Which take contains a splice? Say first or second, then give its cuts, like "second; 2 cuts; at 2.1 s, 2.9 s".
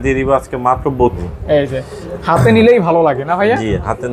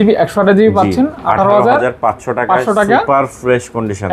first; 1 cut; at 1.2 s